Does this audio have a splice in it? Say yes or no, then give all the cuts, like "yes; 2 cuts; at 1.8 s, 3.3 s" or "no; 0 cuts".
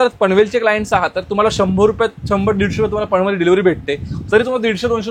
no; 0 cuts